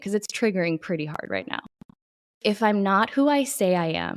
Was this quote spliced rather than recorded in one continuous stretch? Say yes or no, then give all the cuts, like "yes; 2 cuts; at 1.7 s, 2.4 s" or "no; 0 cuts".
yes; 1 cut; at 2.3 s